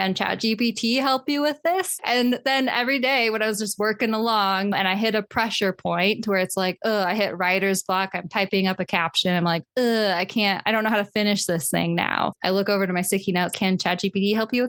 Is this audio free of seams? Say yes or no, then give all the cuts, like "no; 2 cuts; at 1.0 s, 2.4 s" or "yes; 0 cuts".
yes; 0 cuts